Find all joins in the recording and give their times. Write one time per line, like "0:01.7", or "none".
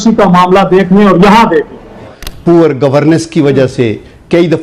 0:02.0